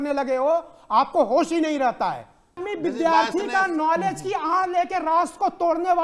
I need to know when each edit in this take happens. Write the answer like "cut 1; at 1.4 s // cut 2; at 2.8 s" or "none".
cut 1; at 2.6 s